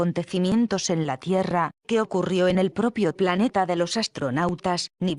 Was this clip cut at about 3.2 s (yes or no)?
no